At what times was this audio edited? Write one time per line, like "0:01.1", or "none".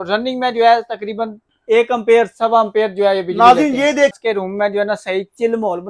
0:04.1